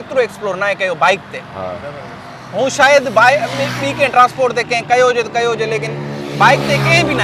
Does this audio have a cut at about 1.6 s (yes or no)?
no